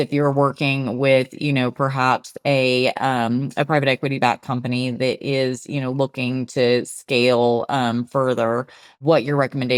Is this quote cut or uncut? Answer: uncut